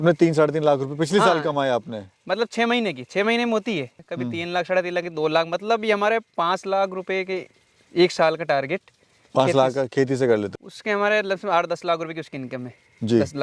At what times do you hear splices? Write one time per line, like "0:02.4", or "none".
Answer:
0:04.0
0:10.5